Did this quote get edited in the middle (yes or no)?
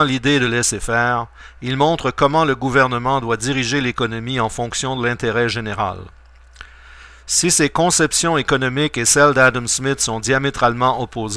yes